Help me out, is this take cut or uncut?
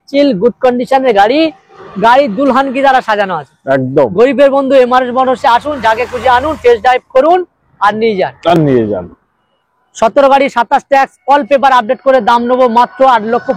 uncut